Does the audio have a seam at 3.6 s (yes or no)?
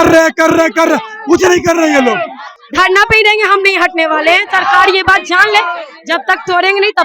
no